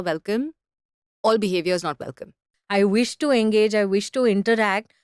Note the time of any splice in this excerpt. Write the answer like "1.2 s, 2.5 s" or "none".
2.4 s